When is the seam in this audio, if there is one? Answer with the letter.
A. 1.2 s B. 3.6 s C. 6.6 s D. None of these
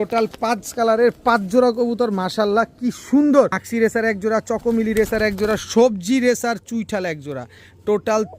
B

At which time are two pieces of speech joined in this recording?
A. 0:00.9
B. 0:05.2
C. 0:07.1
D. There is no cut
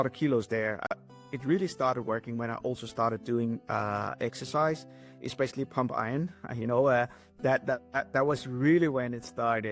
A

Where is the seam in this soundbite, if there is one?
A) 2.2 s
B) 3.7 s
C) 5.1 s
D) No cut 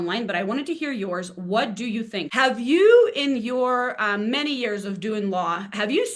A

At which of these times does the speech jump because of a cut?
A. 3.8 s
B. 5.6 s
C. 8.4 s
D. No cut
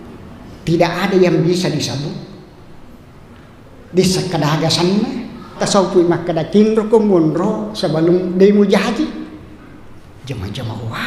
B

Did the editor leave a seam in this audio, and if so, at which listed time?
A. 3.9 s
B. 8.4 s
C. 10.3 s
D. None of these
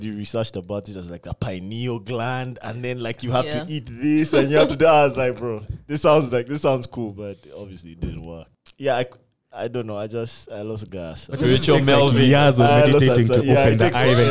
B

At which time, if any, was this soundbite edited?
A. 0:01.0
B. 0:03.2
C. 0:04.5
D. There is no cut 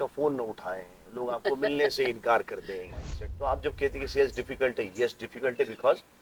B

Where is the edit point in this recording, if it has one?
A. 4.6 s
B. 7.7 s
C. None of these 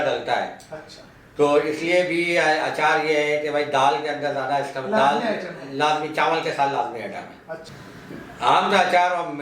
B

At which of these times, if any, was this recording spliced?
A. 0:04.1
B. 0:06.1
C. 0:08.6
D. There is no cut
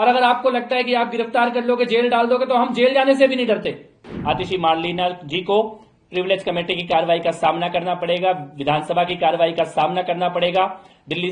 A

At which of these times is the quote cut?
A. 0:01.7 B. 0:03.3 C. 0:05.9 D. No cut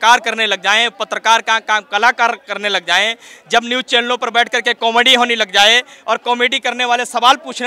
D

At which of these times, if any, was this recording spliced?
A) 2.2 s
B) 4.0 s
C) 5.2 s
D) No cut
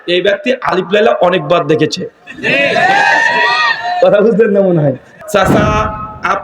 C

